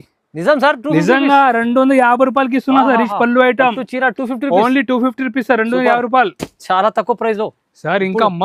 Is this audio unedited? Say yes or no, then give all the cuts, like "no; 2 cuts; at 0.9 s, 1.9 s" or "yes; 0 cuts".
yes; 0 cuts